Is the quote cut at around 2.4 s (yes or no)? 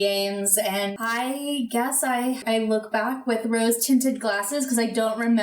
yes